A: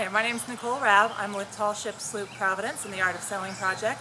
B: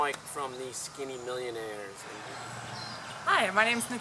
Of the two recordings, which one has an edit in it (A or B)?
B